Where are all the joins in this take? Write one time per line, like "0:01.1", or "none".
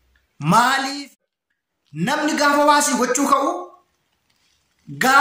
0:00.9